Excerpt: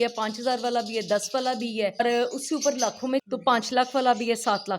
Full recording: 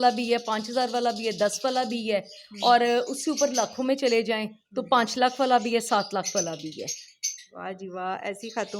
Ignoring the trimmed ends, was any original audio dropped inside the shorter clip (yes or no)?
yes